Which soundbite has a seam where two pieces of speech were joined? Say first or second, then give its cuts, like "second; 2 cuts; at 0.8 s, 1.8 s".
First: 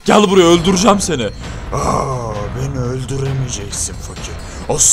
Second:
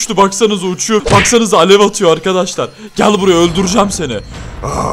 second; 1 cut; at 1.0 s